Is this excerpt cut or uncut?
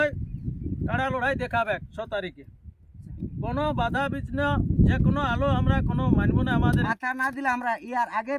cut